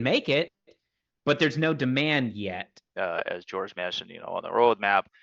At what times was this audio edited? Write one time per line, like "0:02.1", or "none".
0:02.8